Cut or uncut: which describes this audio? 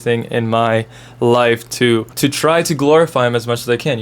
cut